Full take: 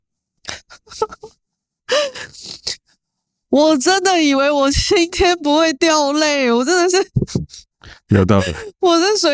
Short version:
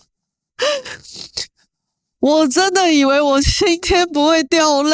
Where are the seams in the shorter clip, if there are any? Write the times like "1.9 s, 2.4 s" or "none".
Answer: none

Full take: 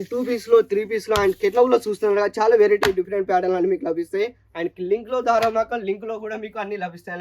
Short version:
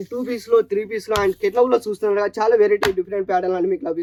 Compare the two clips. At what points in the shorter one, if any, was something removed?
none

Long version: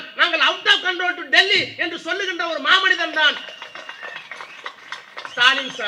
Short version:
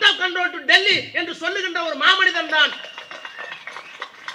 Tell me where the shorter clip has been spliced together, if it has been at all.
none

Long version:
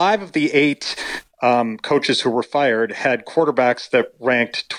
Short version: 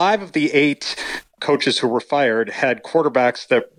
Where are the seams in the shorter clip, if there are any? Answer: 1.3 s

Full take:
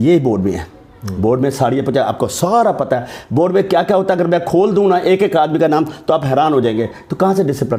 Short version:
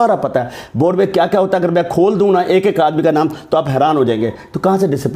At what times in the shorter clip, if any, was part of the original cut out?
none

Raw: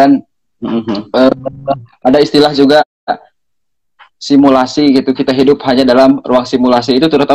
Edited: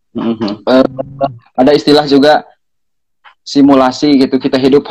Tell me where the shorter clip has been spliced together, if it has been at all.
2.5 s

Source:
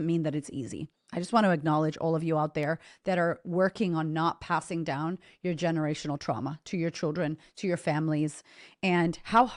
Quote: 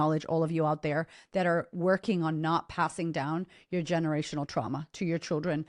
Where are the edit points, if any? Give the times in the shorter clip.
none

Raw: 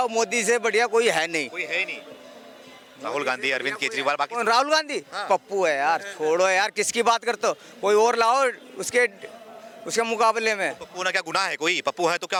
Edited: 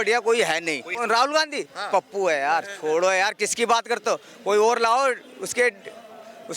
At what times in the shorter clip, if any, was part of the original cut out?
0.9 s

